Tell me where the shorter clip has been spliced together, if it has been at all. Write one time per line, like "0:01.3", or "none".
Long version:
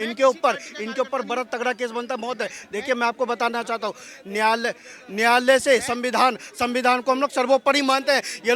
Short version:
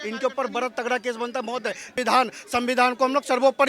0:01.9